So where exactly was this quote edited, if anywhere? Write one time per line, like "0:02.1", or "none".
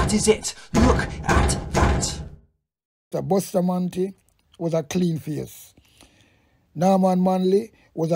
0:03.1